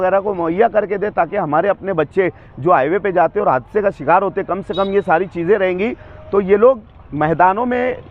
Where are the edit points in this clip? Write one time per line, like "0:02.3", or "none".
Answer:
none

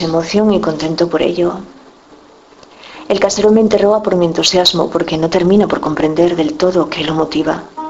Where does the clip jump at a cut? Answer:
0:06.7

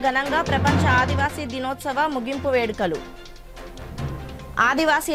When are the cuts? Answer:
none

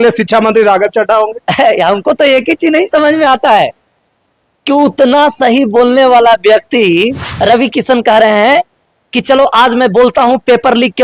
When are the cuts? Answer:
0:07.2

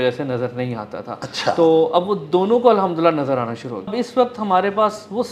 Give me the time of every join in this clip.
0:03.9

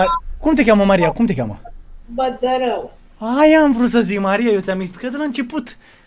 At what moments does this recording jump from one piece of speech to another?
none

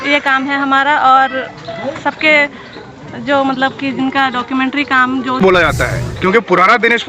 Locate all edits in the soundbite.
0:05.4

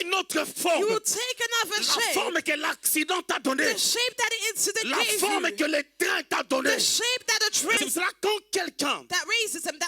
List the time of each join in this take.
0:07.8

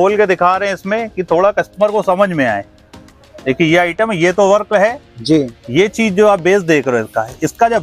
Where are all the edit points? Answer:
none

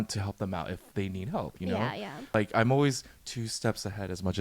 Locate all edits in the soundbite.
0:02.3

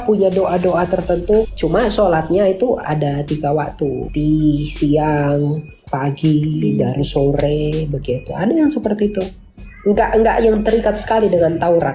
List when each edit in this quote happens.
0:01.5
0:04.1

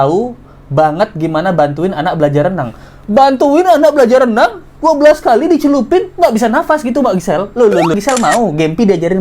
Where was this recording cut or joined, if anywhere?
0:07.9

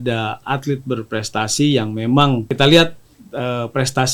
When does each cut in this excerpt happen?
0:02.5

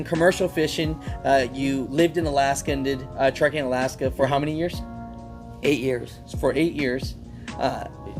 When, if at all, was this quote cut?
none

